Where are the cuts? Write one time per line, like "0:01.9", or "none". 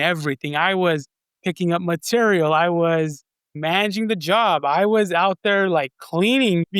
none